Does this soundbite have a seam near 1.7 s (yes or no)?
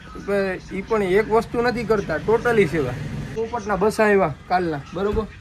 no